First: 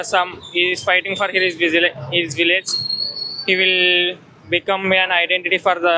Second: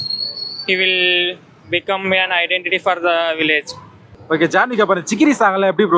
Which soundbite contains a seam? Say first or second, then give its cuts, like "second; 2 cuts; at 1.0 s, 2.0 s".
second; 1 cut; at 4.1 s